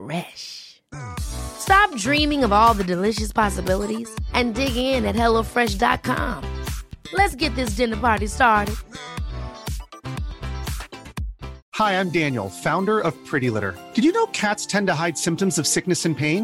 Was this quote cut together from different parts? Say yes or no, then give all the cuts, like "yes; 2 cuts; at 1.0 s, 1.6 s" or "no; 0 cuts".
no; 0 cuts